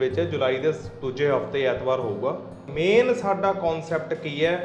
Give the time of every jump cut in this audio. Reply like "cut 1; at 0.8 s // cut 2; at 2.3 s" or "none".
cut 1; at 2.7 s